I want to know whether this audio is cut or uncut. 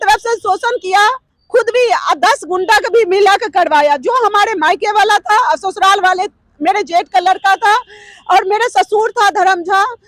uncut